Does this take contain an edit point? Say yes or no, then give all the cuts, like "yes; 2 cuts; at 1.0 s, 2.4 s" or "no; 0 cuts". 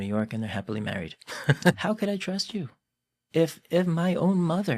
yes; 1 cut; at 1.8 s